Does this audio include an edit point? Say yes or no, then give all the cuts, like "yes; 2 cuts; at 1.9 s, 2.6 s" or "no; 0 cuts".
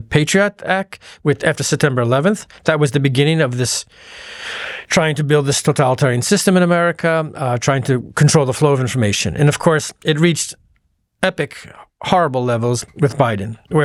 no; 0 cuts